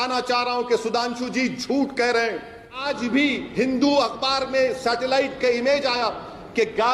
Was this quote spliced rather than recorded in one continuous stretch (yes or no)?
yes